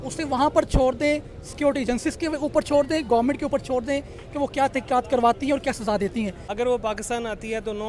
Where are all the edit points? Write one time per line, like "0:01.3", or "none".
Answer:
0:06.4